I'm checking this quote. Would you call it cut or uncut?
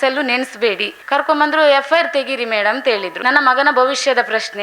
cut